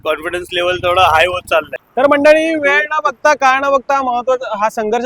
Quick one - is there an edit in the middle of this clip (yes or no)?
yes